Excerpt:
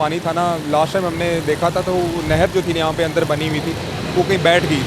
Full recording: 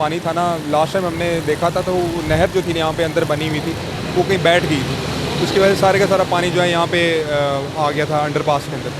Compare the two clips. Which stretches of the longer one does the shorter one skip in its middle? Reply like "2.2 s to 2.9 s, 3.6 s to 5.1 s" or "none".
none